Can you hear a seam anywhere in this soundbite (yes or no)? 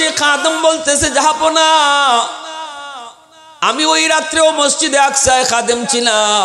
no